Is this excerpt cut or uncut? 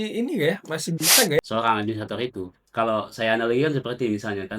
cut